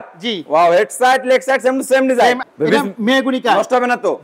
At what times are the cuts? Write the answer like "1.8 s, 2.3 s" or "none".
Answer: 2.4 s